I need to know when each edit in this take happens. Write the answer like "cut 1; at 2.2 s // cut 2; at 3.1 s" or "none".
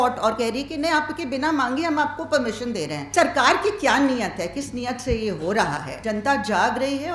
cut 1; at 3.1 s // cut 2; at 5.9 s